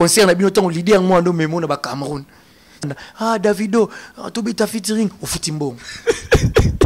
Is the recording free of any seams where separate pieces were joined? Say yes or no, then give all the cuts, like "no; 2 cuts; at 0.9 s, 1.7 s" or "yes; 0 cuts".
no; 1 cut; at 2.9 s